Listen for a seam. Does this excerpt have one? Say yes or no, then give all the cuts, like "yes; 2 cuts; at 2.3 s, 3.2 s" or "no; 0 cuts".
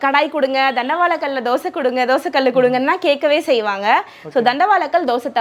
no; 0 cuts